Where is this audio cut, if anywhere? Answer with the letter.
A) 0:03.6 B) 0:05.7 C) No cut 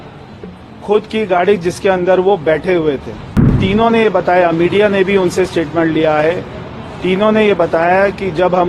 A